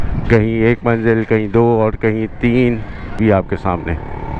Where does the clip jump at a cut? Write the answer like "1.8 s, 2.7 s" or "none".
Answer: 3.2 s